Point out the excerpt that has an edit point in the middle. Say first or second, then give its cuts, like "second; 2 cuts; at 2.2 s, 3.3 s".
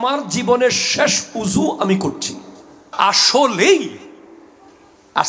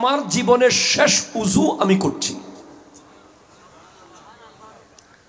first; 1 cut; at 2.8 s